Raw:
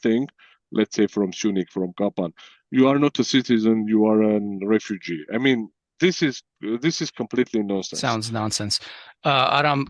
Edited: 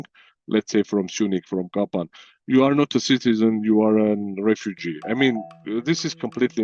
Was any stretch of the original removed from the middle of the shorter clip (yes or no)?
yes